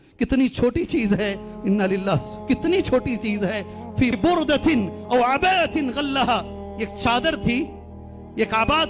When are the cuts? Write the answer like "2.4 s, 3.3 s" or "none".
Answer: 4.2 s